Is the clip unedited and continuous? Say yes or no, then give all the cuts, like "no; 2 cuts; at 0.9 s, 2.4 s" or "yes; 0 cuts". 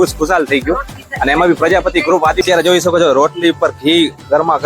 no; 1 cut; at 2.5 s